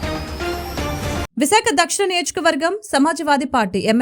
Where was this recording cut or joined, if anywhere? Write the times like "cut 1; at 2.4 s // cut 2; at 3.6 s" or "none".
cut 1; at 1.2 s